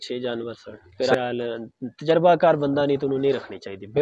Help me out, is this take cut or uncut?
cut